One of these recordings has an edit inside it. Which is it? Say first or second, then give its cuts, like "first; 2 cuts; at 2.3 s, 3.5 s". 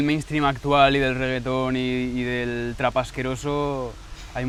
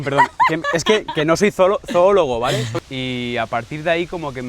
second; 1 cut; at 2.7 s